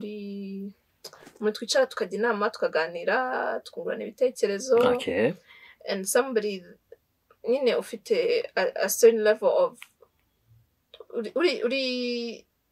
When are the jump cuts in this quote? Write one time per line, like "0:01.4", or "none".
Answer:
none

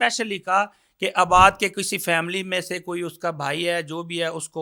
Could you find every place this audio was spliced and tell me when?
none

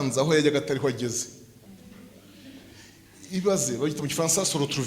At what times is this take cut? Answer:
none

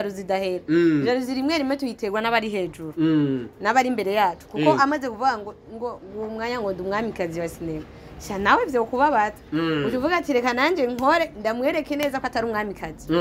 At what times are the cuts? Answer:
none

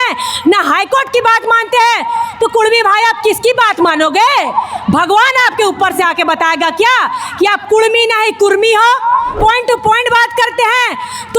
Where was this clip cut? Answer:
0:09.3

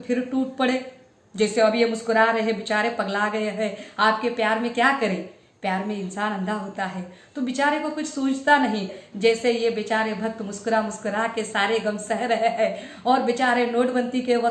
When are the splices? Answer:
0:09.0

